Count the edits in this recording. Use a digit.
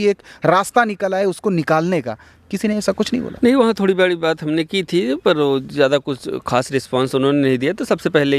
0